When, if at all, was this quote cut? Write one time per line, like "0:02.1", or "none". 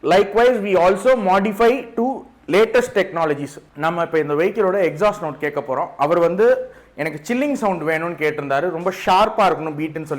0:03.6